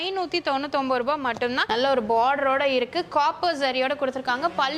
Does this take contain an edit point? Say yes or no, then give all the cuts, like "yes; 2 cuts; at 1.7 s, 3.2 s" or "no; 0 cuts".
yes; 1 cut; at 1.6 s